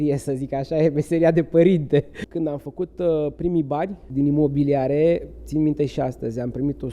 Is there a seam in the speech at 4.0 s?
yes; 2 cuts; at 2.2 s, 4.0 s

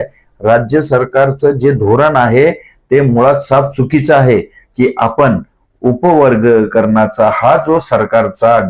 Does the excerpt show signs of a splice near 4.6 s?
yes; 1 cut; at 4.6 s

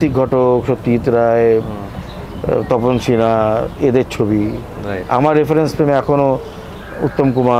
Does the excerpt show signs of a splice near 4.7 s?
no; 0 cuts

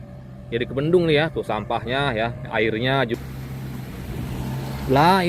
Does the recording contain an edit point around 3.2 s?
yes; 1 cut; at 3.2 s

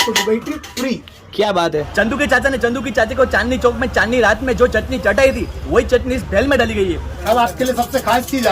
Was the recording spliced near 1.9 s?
yes; 2 cuts; at 1.9 s, 7.1 s

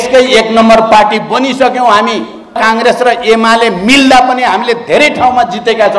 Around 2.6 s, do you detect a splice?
yes; 1 cut; at 2.6 s

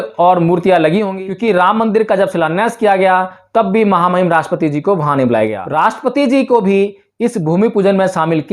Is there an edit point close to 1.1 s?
yes; 2 cuts; at 1.1 s, 5.6 s

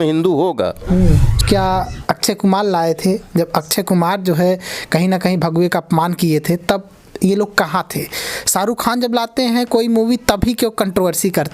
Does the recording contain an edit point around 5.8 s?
no; 1 cut; at 1.4 s

